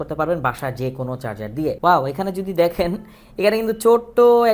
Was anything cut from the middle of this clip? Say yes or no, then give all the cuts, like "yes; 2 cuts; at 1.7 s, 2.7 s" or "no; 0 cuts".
yes; 1 cut; at 1.8 s